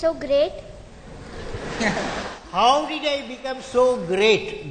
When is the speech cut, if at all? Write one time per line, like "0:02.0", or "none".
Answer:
none